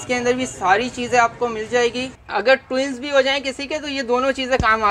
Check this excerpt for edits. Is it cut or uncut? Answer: cut